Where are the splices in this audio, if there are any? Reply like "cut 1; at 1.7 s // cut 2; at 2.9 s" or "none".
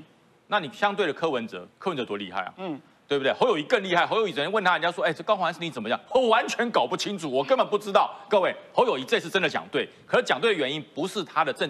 none